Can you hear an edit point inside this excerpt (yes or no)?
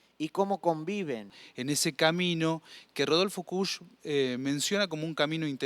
yes